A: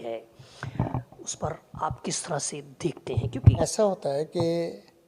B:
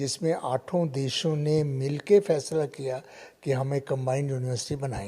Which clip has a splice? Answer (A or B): A